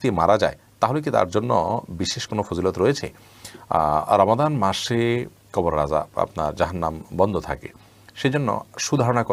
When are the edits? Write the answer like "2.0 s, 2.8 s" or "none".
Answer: none